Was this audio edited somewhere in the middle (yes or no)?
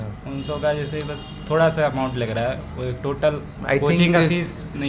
no